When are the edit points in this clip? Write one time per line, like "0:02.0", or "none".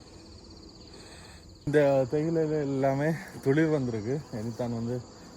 0:01.6